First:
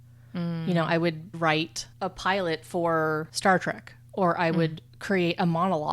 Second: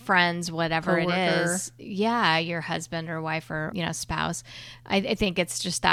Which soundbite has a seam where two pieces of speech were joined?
first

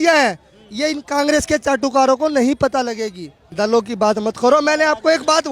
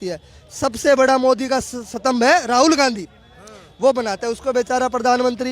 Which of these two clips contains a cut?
first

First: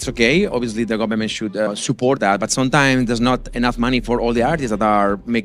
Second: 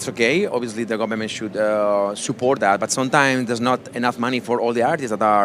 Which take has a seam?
first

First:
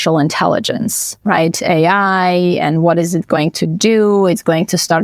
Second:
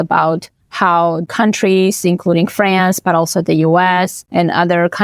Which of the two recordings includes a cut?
second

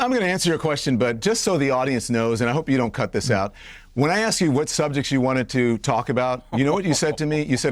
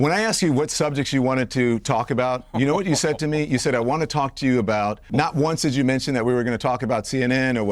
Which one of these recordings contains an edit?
second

